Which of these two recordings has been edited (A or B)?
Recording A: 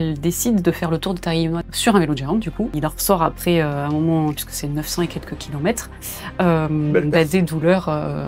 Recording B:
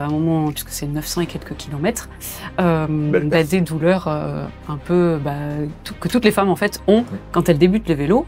A